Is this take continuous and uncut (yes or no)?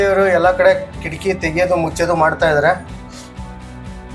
yes